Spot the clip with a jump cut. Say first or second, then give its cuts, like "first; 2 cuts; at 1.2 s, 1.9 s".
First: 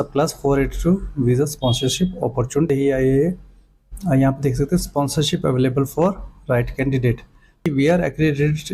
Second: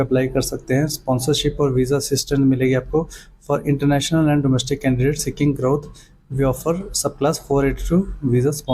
first; 2 cuts; at 2.7 s, 7.6 s